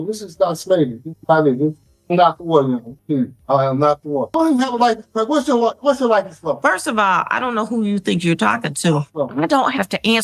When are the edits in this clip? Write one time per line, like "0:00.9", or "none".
0:04.3
0:09.1